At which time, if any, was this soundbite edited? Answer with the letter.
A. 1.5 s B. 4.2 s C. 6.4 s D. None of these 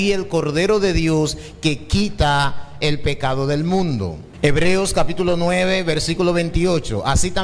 B